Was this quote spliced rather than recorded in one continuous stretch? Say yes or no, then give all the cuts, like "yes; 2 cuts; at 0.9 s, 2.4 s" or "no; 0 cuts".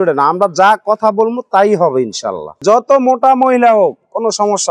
yes; 1 cut; at 2.5 s